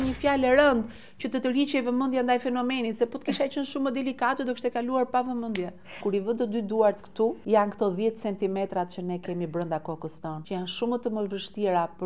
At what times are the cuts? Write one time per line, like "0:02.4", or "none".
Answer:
0:06.0
0:07.4
0:10.4